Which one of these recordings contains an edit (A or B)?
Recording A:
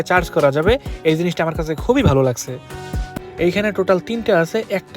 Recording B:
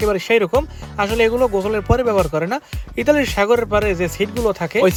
A